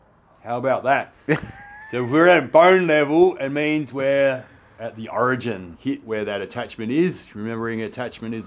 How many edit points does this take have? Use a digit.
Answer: 1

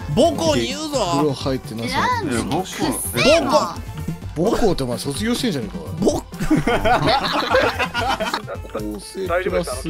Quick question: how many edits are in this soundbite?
1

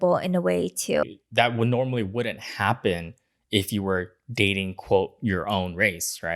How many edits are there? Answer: 1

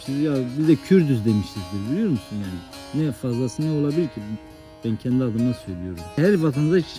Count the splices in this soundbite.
0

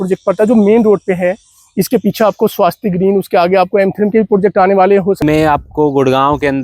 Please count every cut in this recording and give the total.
1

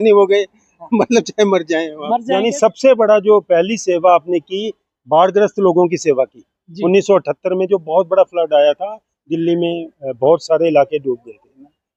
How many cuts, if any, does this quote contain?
1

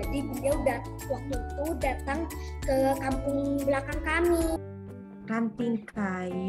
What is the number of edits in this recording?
1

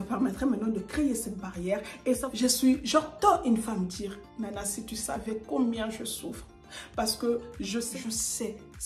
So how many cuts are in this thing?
2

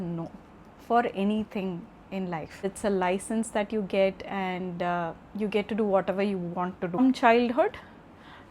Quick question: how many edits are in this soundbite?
2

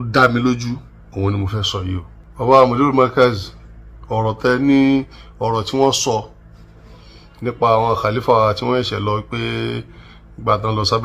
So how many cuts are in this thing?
1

